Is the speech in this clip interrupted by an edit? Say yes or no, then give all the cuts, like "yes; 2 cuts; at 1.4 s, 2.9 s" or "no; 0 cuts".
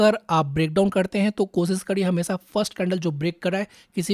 no; 0 cuts